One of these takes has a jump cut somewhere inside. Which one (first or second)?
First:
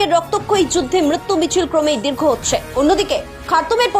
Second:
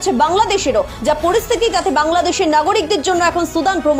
first